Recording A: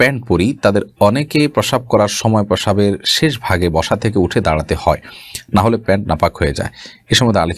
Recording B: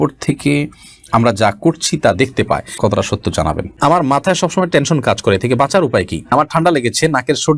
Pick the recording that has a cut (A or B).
B